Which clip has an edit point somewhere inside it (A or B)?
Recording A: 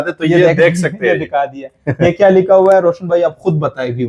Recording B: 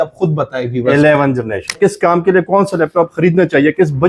B